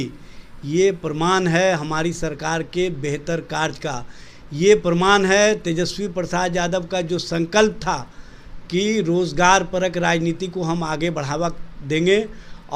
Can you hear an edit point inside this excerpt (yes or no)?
no